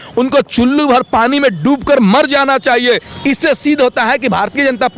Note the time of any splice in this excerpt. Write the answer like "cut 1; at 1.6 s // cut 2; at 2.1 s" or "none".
cut 1; at 3.1 s